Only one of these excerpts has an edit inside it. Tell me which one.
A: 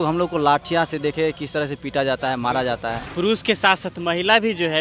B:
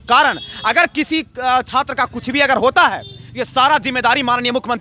A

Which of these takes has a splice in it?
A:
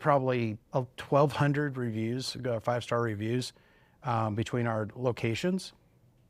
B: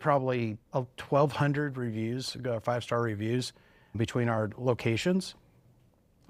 B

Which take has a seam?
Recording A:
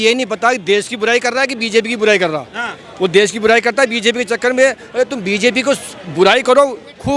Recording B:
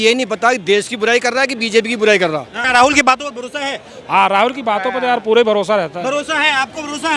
B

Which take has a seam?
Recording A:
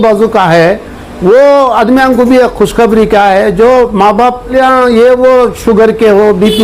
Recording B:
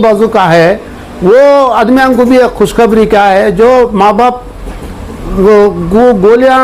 A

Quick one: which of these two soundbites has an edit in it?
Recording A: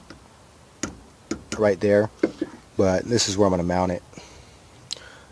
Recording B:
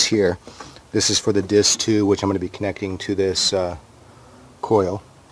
B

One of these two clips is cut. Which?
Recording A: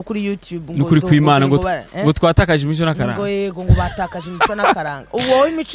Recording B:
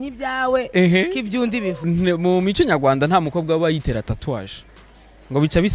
B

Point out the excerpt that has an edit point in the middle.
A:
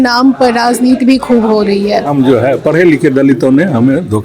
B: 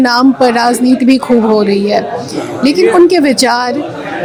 A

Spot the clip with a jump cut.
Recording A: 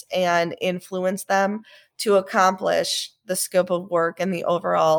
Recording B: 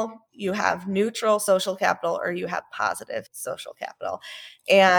B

